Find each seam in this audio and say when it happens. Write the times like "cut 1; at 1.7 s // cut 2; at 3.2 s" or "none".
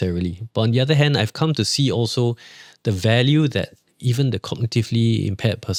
none